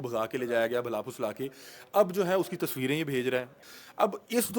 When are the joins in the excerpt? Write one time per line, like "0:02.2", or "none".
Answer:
0:03.6